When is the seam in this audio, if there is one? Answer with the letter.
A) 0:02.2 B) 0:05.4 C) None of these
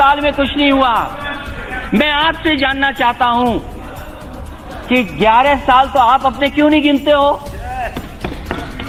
C